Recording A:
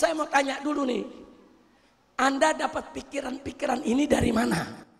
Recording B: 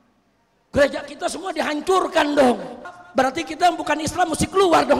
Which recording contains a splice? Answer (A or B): B